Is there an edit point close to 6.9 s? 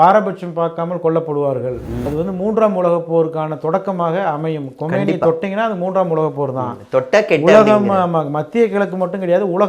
no; 1 cut; at 2.1 s

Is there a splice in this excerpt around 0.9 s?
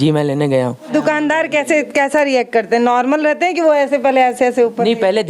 yes; 1 cut; at 0.9 s

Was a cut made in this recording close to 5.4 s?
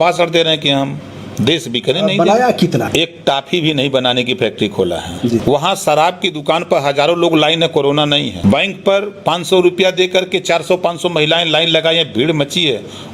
yes; 3 cuts; at 2.8 s, 5.4 s, 8.4 s

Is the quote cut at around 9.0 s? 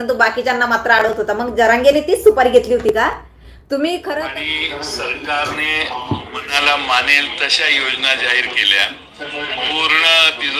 no; 1 cut; at 4.2 s

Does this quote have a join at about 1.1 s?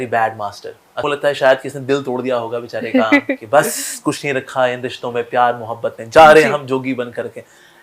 yes; 1 cut; at 1.1 s

